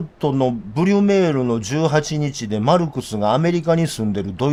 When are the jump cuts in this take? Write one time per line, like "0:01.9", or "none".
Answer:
none